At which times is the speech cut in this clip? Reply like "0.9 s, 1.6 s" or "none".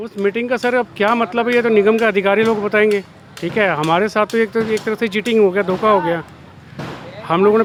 none